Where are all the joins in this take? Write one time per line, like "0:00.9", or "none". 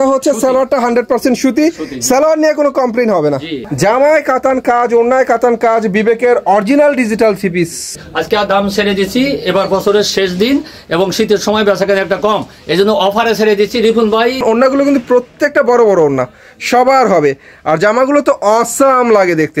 0:03.6
0:08.0
0:14.4